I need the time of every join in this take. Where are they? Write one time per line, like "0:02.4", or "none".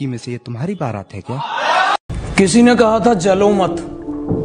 none